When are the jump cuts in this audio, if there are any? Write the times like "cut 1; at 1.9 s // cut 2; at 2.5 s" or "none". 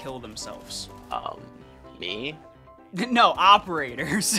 none